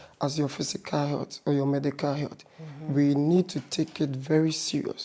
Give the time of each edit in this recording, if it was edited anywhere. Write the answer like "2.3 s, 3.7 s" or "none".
none